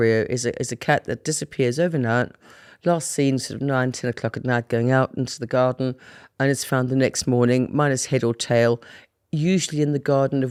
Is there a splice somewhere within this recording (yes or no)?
no